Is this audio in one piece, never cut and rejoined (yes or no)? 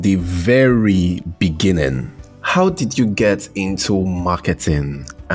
yes